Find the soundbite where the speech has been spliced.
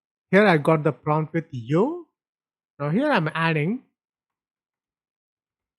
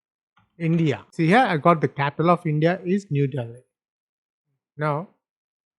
second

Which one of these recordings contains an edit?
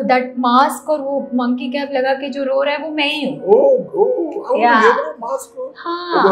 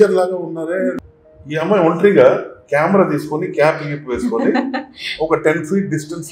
second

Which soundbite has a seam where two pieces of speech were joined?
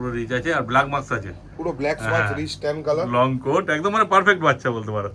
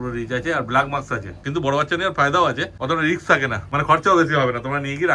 second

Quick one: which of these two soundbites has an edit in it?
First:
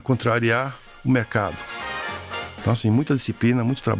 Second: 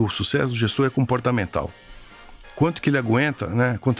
first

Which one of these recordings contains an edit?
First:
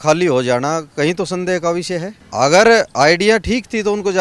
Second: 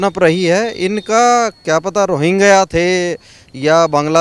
first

